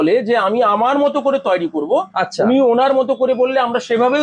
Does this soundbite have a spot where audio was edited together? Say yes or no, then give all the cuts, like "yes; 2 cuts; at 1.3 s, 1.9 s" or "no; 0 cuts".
no; 0 cuts